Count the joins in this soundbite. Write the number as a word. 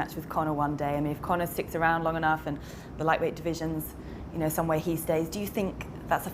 zero